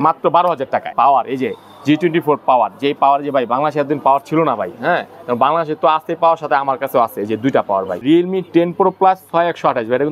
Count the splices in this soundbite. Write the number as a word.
two